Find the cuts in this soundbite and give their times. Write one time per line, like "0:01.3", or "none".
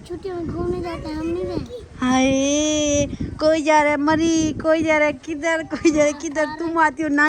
none